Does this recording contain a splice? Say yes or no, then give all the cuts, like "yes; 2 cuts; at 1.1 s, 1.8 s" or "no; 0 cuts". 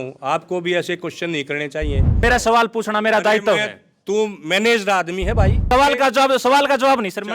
yes; 2 cuts; at 2.1 s, 5.7 s